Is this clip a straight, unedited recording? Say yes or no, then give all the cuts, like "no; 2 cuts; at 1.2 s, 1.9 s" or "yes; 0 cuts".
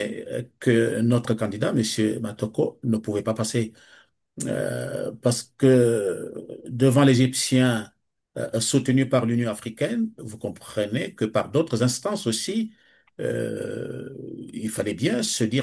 yes; 0 cuts